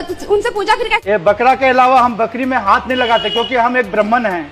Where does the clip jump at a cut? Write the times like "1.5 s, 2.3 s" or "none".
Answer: 1.0 s